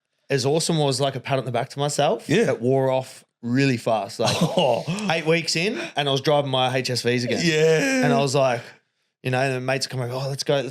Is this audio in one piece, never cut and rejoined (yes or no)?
yes